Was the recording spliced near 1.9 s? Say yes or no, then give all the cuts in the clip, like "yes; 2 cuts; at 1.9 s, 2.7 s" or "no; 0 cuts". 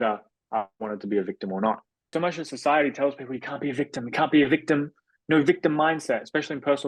yes; 1 cut; at 1.9 s